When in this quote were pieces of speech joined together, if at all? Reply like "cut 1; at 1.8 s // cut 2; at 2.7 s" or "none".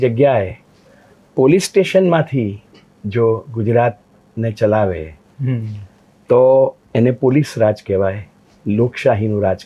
none